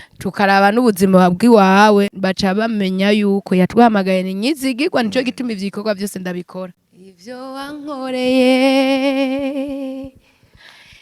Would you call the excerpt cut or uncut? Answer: cut